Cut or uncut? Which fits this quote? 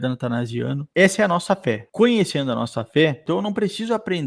cut